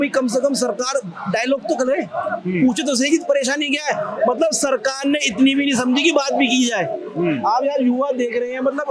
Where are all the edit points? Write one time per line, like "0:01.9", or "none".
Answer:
none